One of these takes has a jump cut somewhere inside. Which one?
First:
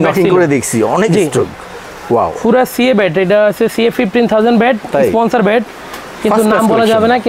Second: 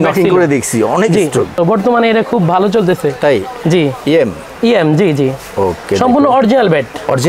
second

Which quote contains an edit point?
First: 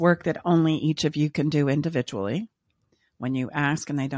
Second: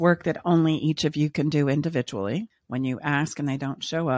second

